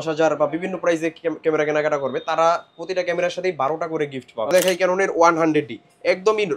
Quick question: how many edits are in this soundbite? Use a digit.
1